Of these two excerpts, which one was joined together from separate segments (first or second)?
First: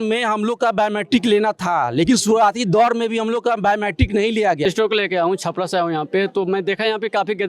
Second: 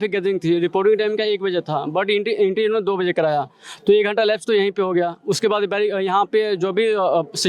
first